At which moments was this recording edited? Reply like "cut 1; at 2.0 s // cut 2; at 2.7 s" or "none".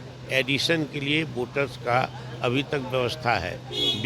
none